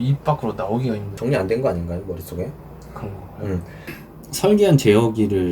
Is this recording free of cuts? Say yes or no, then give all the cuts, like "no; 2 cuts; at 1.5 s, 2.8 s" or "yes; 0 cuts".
no; 2 cuts; at 1.1 s, 3.8 s